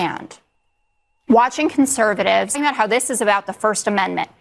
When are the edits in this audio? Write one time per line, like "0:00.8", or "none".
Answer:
0:02.6